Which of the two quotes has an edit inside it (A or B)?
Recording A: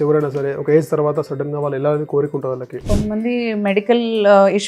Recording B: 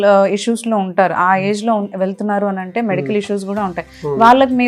A